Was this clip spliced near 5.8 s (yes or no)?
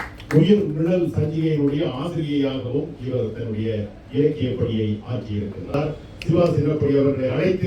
yes